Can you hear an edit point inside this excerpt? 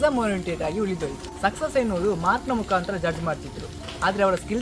no; 0 cuts

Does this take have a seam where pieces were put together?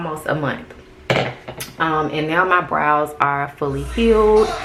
no; 0 cuts

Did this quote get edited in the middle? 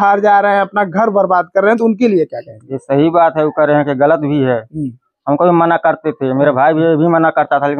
no; 0 cuts

